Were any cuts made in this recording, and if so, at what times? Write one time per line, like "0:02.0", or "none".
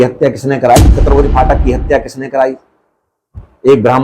0:00.9